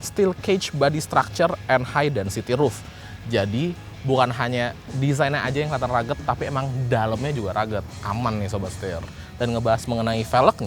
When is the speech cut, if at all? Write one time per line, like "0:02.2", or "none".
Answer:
none